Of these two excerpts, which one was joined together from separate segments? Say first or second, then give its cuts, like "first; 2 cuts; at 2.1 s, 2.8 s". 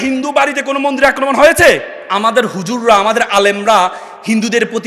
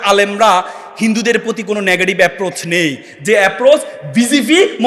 first; 1 cut; at 2.0 s